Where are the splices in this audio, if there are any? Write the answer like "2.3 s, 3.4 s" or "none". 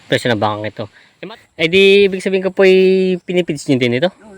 1.0 s